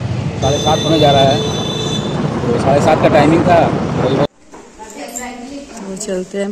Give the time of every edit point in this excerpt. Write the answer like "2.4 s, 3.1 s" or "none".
4.3 s